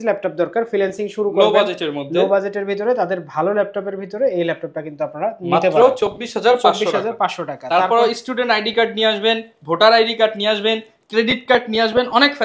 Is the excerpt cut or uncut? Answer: uncut